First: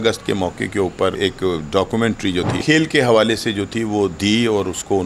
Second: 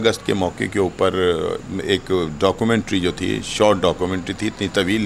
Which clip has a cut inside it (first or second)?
first